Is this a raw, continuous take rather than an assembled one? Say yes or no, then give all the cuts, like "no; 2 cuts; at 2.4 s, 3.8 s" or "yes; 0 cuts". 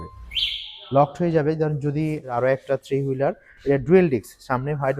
no; 1 cut; at 2.2 s